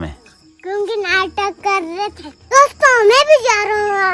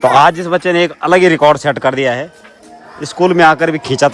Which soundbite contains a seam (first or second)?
first